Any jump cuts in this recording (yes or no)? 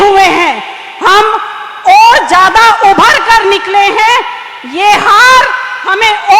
no